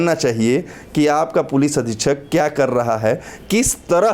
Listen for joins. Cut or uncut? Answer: uncut